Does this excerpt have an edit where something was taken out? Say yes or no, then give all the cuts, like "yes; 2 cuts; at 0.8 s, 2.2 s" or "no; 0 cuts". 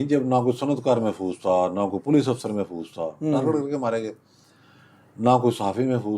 no; 0 cuts